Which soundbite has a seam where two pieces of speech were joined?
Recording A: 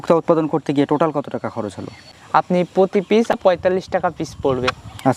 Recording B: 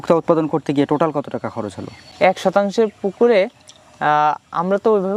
A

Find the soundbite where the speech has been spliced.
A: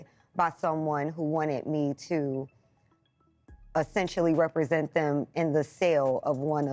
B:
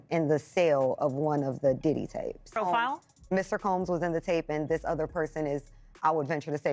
B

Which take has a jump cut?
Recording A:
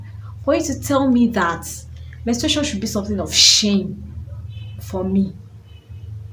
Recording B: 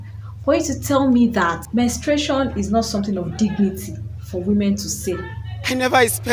B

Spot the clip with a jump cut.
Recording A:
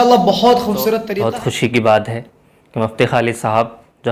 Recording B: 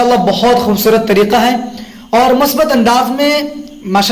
A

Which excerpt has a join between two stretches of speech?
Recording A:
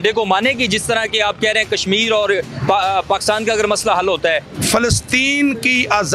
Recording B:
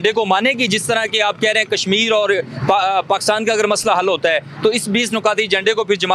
A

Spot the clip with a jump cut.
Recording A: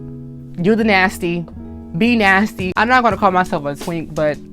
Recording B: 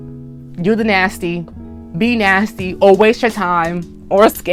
A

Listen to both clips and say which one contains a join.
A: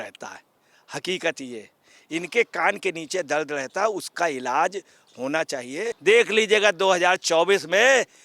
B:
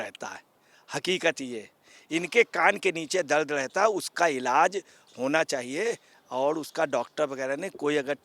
A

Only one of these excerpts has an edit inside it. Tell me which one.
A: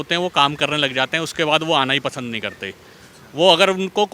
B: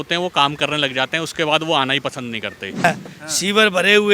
B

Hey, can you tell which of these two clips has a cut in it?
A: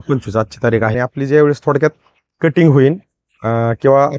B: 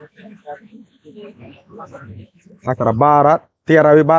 A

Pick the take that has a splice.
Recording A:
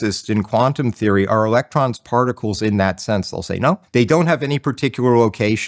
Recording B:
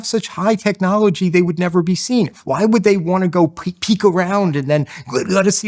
A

